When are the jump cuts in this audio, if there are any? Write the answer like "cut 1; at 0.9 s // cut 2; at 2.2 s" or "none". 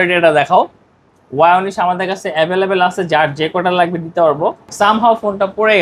cut 1; at 4.6 s